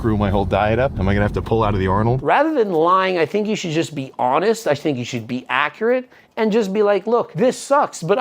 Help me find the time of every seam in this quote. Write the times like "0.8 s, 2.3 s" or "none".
1.0 s, 2.2 s, 7.3 s

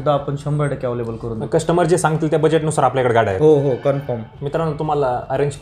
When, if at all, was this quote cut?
none

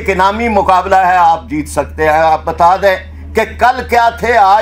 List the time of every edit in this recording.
none

